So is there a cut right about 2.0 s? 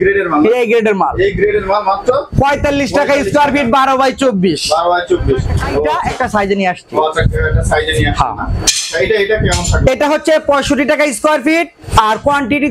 no; 1 cut; at 5.9 s

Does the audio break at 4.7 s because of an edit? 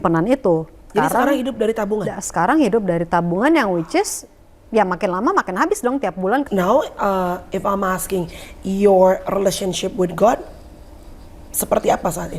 no; 2 cuts; at 0.9 s, 6.5 s

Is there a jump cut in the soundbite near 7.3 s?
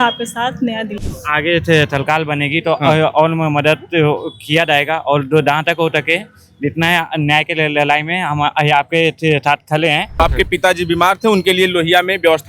no; 2 cuts; at 1.1 s, 10.2 s

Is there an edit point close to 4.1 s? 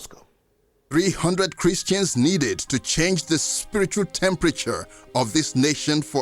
no; 1 cut; at 0.9 s

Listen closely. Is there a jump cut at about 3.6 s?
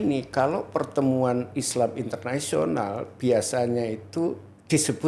no; 0 cuts

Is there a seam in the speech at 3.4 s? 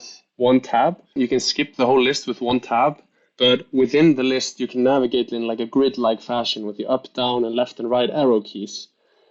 no; 1 cut; at 1.1 s

